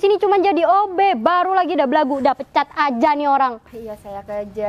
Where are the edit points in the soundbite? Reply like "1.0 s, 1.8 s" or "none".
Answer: 3.7 s